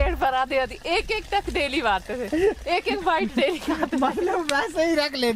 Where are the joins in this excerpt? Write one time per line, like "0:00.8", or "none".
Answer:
none